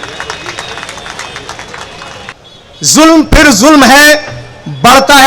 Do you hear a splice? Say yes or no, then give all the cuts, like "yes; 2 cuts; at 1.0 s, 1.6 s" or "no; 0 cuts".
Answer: yes; 1 cut; at 2.3 s